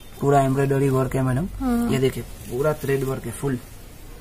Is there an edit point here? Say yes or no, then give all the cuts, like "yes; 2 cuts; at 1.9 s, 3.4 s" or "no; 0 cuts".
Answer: no; 0 cuts